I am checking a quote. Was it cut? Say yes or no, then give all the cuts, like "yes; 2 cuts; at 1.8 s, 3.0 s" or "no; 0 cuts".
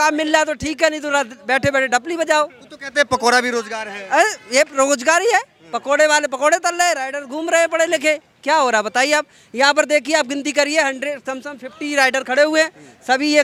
no; 0 cuts